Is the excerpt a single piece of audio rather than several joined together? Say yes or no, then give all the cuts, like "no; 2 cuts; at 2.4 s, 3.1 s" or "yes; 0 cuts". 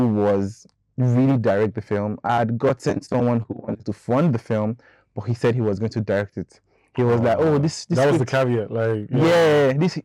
yes; 0 cuts